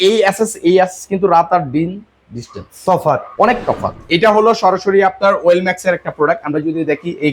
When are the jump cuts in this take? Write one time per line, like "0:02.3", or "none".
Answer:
0:04.0